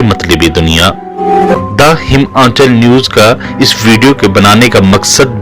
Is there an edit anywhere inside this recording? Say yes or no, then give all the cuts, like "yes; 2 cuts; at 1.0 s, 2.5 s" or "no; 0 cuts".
yes; 1 cut; at 1.5 s